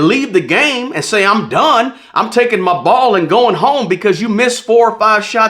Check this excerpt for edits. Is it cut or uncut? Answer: uncut